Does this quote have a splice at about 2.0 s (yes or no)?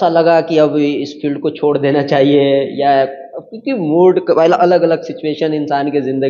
no